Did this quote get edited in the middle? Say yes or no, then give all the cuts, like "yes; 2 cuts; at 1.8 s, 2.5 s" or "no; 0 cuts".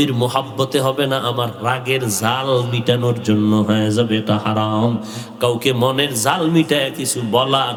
no; 0 cuts